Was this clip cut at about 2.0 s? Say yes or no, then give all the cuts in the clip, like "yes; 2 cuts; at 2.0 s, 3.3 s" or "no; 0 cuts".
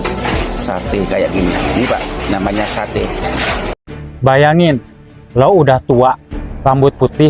no; 1 cut; at 3.8 s